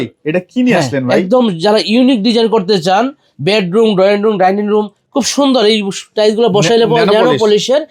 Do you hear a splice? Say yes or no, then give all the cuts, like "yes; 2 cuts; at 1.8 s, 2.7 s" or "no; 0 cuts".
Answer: no; 0 cuts